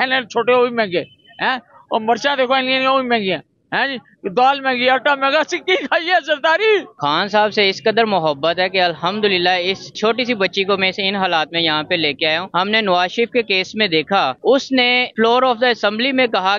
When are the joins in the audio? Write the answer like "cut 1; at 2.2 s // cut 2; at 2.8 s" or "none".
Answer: cut 1; at 6.9 s // cut 2; at 9.9 s // cut 3; at 12.5 s